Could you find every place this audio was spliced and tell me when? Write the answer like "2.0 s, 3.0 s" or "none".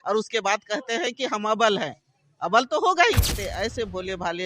3.4 s